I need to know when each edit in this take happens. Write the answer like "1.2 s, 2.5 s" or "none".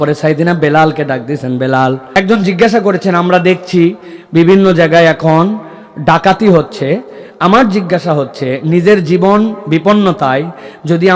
2.0 s